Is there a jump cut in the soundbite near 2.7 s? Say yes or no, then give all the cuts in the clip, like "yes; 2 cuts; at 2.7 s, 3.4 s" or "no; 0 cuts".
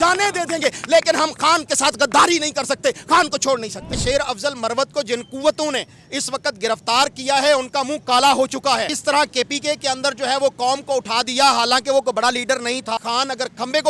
no; 3 cuts; at 3.9 s, 8.9 s, 13.0 s